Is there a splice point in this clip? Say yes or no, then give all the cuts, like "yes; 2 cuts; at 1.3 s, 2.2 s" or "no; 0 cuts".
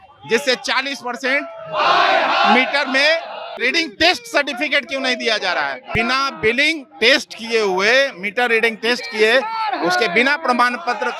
yes; 2 cuts; at 3.5 s, 5.8 s